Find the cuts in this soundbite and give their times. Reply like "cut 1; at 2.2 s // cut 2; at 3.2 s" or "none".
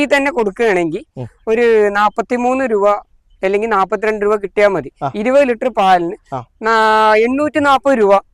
cut 1; at 4.9 s